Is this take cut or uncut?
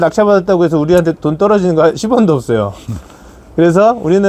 uncut